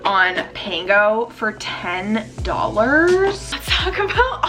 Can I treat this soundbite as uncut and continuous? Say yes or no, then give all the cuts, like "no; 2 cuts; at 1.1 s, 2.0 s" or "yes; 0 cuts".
no; 1 cut; at 3.5 s